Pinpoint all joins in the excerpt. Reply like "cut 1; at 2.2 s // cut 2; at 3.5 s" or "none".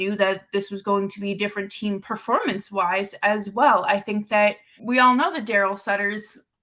cut 1; at 4.7 s